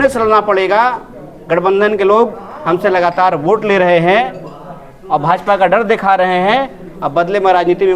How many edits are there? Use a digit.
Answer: 0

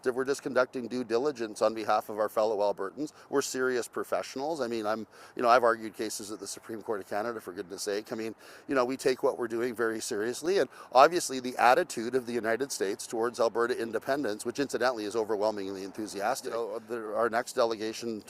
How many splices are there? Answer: 1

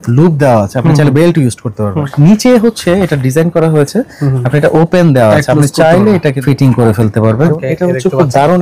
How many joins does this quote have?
3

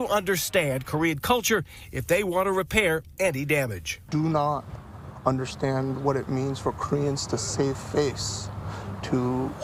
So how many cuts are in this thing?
0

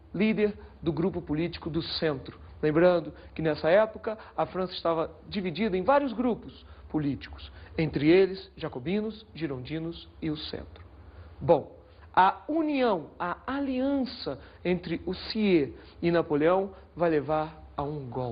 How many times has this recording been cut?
1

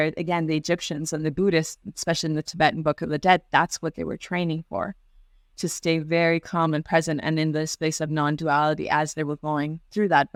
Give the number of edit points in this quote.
0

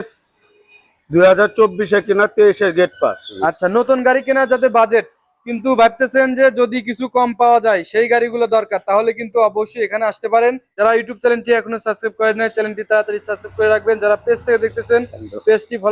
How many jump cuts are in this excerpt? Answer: 2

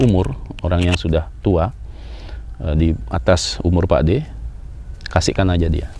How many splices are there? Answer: 0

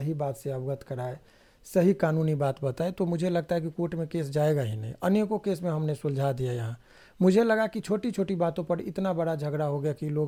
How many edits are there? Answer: 0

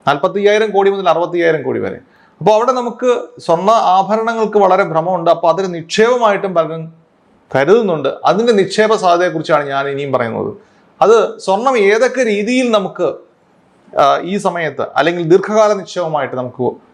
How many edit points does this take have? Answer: 0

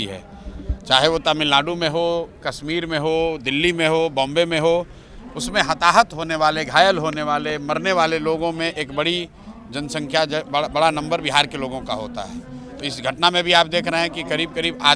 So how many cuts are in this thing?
0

